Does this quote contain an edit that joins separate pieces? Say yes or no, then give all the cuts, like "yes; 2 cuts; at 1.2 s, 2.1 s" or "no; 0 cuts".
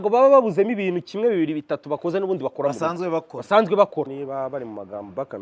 yes; 1 cut; at 4.2 s